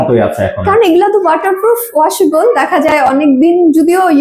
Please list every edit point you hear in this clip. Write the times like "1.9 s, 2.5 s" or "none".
none